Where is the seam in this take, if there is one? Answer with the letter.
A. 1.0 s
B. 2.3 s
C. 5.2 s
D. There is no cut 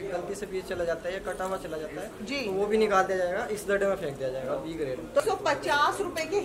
C